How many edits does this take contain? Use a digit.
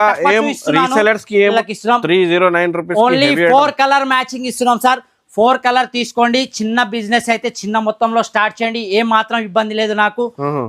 1